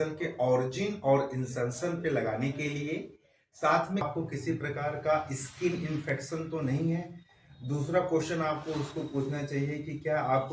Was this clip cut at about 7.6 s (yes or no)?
no